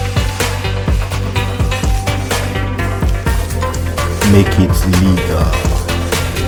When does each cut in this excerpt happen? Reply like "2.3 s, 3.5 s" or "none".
none